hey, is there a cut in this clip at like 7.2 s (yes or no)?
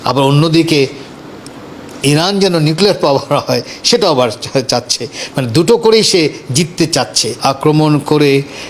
yes